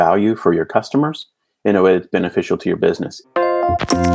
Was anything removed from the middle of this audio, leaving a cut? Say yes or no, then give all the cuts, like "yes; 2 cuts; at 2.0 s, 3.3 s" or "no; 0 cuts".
yes; 1 cut; at 3.2 s